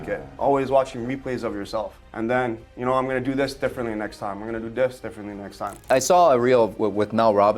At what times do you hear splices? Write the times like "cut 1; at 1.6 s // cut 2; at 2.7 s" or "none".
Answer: cut 1; at 2.0 s // cut 2; at 5.9 s